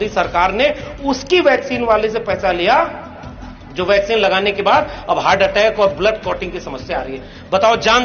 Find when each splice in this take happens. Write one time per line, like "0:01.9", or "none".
none